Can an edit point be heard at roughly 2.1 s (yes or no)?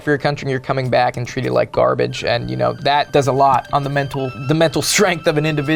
no